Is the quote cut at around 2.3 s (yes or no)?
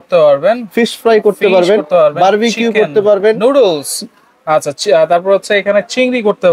no